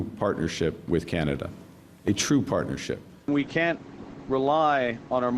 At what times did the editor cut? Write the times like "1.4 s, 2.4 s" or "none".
3.3 s